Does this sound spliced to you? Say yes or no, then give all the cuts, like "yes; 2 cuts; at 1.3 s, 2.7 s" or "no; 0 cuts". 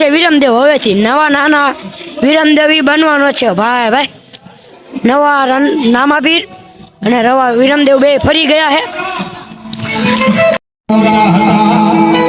yes; 1 cut; at 10.6 s